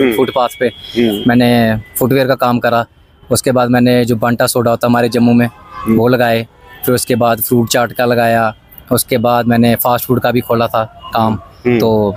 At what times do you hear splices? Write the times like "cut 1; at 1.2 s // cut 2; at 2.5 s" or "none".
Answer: none